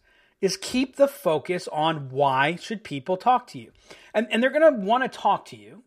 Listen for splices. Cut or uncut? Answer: uncut